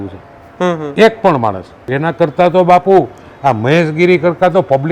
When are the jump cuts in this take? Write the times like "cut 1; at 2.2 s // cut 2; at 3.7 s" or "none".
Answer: cut 1; at 1.9 s